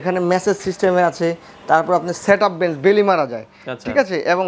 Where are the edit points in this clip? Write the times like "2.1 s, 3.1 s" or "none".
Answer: none